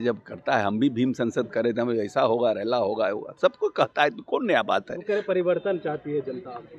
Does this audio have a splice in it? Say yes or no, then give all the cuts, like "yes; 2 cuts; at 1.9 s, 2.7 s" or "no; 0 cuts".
no; 0 cuts